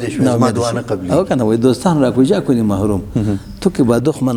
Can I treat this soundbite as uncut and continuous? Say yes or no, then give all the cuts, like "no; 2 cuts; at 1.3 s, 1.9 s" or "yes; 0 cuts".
yes; 0 cuts